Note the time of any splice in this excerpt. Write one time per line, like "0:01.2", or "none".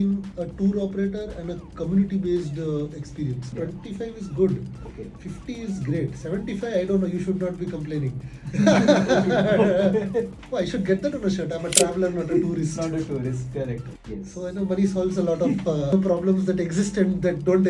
0:03.5
0:10.4
0:13.9
0:15.9